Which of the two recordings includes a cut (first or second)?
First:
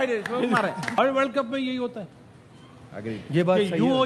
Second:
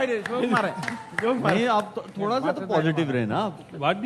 first